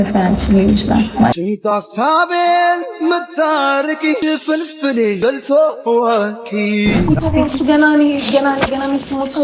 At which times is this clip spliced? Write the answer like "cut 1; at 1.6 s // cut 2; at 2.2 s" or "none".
cut 1; at 7.0 s